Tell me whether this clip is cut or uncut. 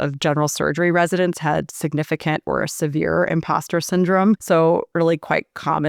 cut